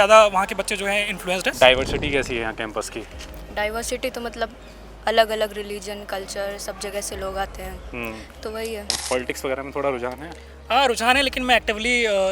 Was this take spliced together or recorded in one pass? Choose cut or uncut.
cut